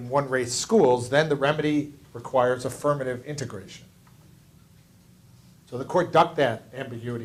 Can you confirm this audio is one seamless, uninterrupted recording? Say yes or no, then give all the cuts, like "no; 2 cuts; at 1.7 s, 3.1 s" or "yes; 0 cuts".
yes; 0 cuts